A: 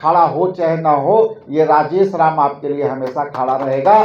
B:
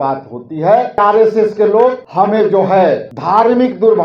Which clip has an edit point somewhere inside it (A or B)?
B